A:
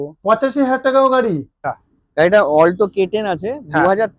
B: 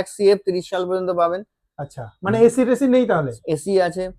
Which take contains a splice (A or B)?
A